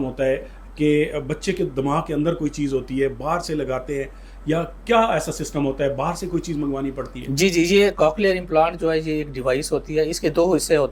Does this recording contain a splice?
no; 0 cuts

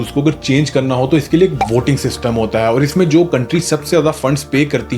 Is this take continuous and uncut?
yes; 0 cuts

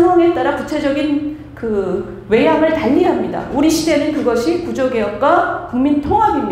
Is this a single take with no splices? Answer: yes; 0 cuts

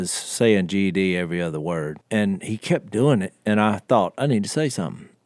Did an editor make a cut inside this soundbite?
yes; 1 cut; at 1.9 s

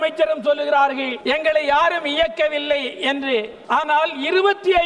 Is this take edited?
yes; 2 cuts; at 1.1 s, 3.6 s

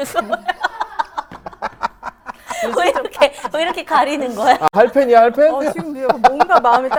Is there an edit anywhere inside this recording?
no; 0 cuts

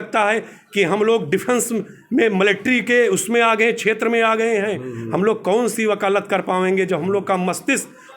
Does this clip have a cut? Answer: no; 0 cuts

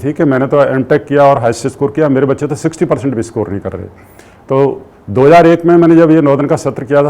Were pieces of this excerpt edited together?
no; 0 cuts

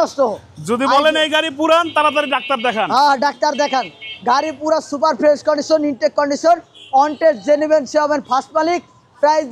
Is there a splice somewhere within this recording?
no; 0 cuts

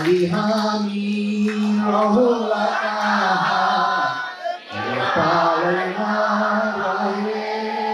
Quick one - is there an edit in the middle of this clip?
no; 0 cuts

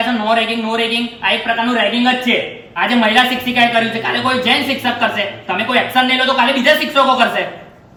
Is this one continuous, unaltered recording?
yes; 0 cuts

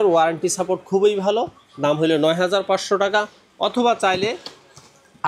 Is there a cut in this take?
no; 0 cuts

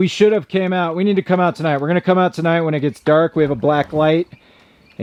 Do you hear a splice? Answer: no; 0 cuts

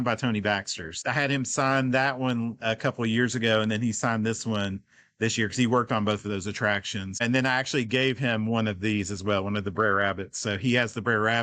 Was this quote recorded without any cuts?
no; 2 cuts; at 0.9 s, 7.2 s

